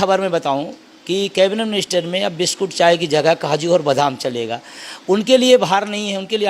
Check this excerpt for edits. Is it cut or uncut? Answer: uncut